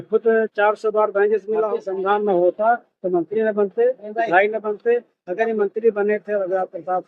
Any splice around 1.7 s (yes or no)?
yes